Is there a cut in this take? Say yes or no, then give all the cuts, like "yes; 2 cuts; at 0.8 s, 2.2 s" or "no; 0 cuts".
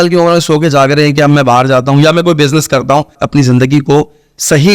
yes; 1 cut; at 3.2 s